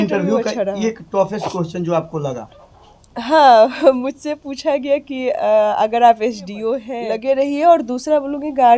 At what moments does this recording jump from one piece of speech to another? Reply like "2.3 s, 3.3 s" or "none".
6.9 s